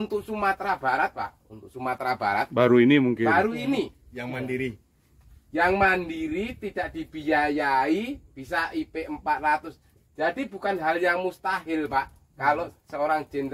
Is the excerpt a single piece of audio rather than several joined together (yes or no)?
yes